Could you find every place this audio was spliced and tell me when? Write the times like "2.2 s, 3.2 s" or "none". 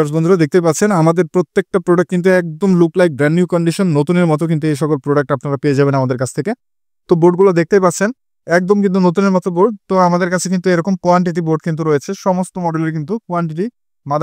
none